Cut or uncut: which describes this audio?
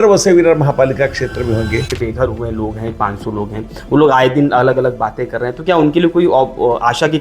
cut